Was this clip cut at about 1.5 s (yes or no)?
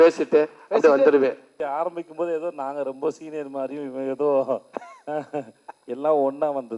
yes